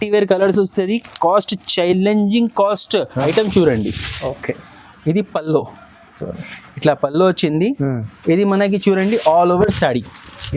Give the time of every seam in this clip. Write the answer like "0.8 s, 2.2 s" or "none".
3.2 s

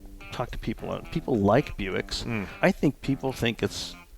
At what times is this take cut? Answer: 2.5 s

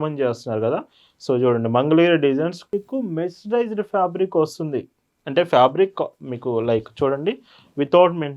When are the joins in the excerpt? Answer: 2.7 s

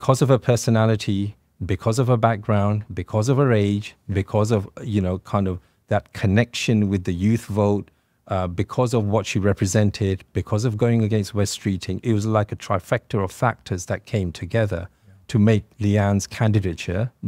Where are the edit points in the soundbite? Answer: none

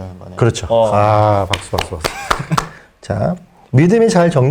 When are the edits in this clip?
2.7 s

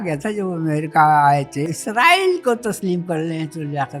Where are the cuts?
1.7 s

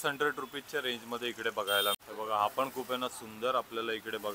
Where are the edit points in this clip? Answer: 2.0 s

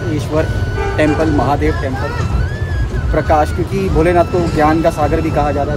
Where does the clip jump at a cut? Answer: none

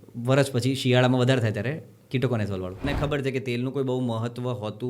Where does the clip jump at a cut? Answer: 2.8 s

